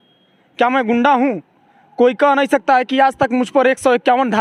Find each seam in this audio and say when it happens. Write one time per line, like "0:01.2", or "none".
none